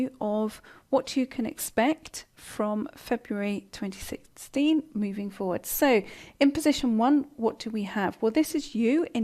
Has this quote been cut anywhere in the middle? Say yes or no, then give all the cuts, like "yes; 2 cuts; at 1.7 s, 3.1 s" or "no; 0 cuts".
yes; 1 cut; at 7.0 s